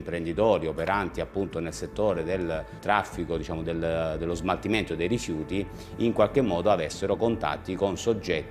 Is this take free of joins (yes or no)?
no